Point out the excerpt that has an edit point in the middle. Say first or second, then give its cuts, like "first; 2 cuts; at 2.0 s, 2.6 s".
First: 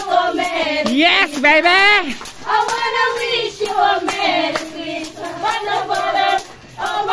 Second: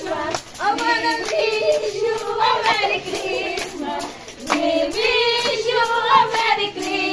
first; 1 cut; at 6.2 s